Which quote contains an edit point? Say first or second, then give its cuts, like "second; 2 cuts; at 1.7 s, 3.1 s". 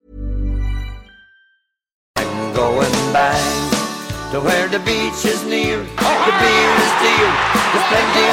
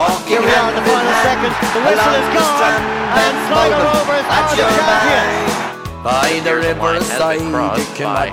first; 1 cut; at 1.9 s